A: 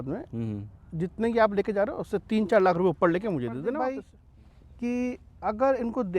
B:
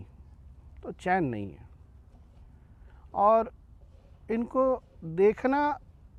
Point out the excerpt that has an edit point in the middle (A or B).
A